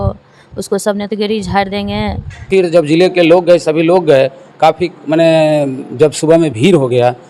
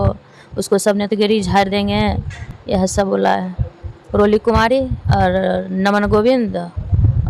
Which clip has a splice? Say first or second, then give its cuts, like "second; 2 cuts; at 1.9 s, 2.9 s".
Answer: first; 1 cut; at 2.4 s